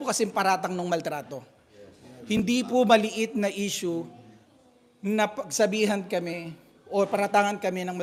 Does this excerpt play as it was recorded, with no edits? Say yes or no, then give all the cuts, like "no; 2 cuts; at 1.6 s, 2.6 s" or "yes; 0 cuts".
yes; 0 cuts